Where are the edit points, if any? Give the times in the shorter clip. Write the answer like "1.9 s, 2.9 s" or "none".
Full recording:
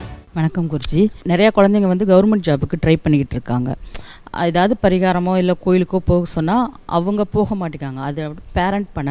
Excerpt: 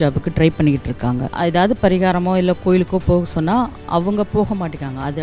1.3 s